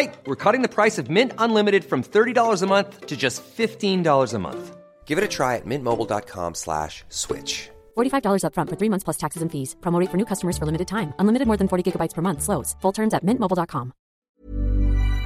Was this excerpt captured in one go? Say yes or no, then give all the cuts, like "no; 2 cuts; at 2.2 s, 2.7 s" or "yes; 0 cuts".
no; 1 cut; at 14.1 s